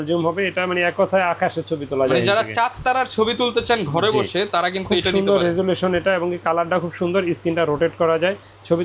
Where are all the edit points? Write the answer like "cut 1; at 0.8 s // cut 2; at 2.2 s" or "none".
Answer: none